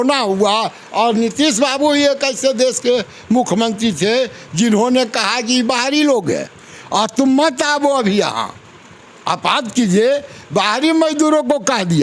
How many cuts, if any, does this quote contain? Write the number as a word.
zero